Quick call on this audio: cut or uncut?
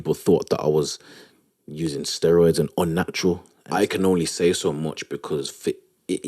cut